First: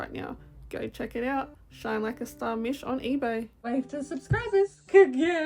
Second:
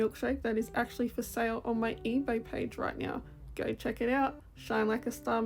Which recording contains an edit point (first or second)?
first